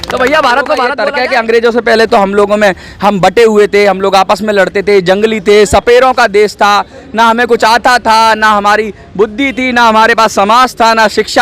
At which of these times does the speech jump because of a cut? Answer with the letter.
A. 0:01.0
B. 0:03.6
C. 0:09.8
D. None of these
A